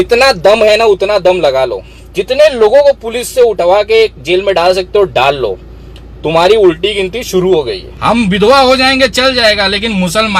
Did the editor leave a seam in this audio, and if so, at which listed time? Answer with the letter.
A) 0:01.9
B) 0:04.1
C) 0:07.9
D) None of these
C